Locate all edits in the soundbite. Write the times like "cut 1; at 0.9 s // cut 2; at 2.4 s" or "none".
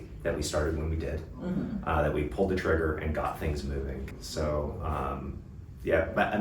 cut 1; at 4.1 s